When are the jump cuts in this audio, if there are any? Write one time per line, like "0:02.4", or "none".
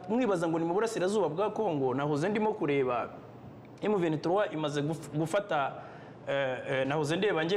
none